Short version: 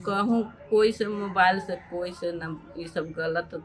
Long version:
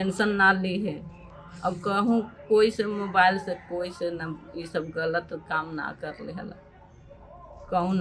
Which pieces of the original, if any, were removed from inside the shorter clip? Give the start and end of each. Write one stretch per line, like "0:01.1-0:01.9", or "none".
none